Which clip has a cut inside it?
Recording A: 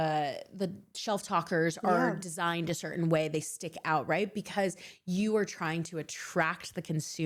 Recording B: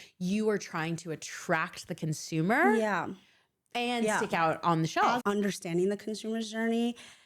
B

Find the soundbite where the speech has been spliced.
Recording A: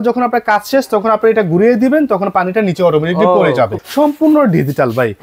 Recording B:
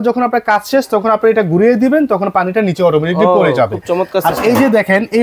A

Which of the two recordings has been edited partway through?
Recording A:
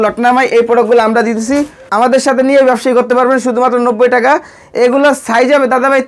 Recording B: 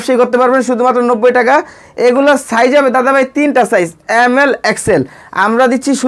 A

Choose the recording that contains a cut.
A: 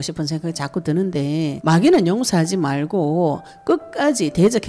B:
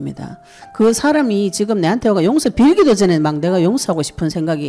A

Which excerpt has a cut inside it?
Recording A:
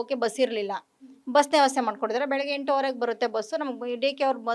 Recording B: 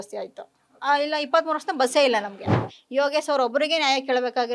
B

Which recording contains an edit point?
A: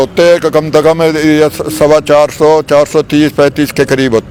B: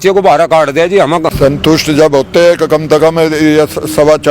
B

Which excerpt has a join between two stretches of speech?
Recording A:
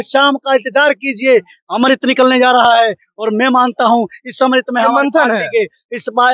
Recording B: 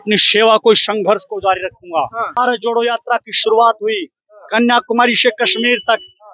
B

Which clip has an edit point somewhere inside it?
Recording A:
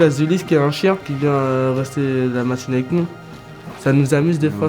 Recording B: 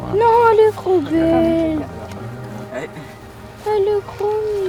A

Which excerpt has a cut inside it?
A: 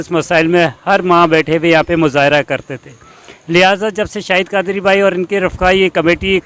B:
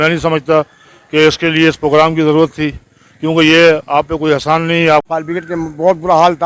B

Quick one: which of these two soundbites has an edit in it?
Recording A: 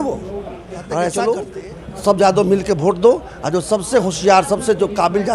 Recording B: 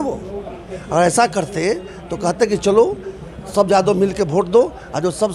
A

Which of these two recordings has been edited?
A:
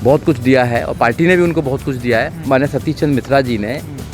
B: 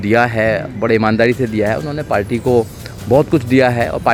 A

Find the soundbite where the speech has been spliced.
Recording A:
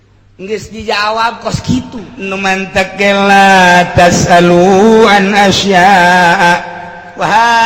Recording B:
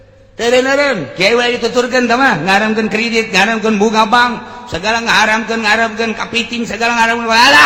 A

